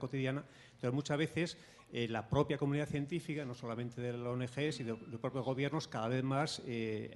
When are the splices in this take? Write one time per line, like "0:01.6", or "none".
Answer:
0:03.4